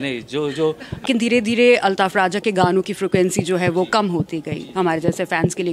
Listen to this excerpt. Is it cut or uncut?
cut